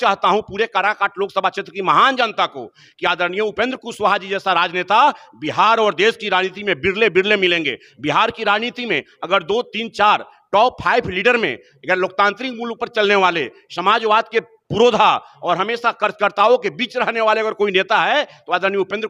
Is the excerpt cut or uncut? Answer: uncut